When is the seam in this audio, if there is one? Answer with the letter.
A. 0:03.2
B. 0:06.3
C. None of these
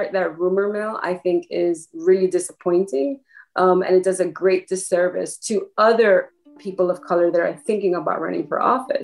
C